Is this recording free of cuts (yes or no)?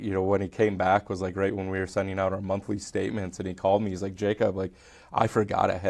yes